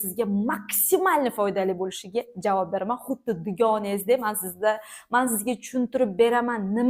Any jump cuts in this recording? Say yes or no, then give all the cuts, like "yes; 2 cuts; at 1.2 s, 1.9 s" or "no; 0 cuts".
no; 0 cuts